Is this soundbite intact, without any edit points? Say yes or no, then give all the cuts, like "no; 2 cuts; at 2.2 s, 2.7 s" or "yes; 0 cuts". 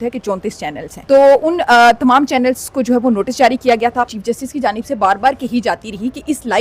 no; 2 cuts; at 0.9 s, 4.1 s